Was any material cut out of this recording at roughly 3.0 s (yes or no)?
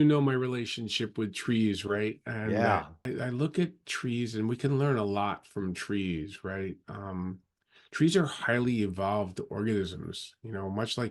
yes